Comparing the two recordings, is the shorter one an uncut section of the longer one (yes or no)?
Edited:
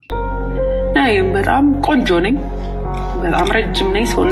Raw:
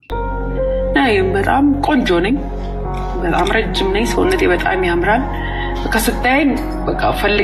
yes